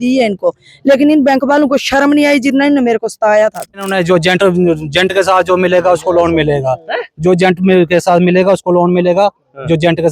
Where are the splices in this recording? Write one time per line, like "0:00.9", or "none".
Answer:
0:03.9